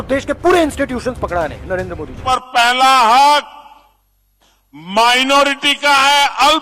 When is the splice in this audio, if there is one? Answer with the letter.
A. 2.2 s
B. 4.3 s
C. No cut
A